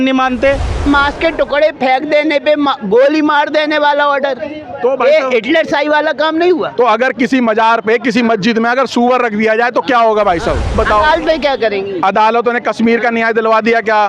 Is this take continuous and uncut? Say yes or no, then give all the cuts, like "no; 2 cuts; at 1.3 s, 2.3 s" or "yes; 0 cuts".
no; 2 cuts; at 0.8 s, 10.8 s